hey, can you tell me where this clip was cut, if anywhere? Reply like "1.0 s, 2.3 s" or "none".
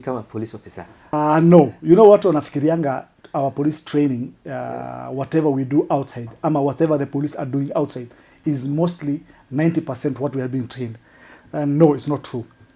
1.1 s